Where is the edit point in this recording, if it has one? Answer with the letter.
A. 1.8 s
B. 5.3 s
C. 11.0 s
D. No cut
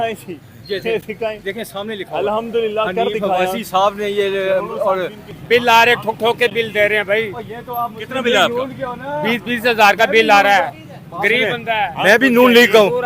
B